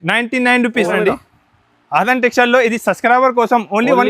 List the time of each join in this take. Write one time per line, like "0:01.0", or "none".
0:00.9